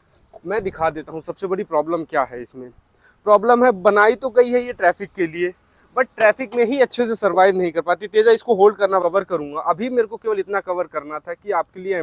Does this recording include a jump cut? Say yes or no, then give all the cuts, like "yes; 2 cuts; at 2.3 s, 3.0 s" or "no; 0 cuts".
yes; 1 cut; at 9.0 s